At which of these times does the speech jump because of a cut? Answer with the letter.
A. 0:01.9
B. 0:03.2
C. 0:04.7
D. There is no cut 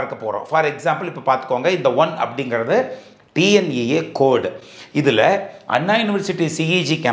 D